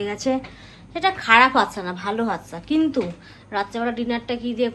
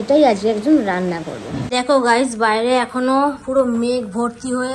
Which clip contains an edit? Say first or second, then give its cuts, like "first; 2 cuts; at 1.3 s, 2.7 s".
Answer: second; 1 cut; at 1.6 s